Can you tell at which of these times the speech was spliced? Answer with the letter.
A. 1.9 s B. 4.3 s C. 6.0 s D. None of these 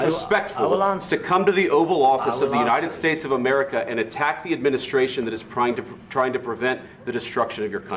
D